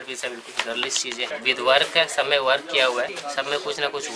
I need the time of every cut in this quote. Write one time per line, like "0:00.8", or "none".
none